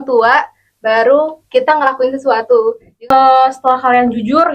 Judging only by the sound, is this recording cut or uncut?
cut